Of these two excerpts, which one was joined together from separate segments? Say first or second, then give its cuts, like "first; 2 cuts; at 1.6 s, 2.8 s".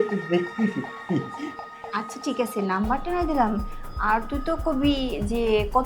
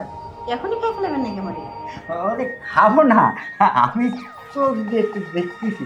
first; 1 cut; at 1.7 s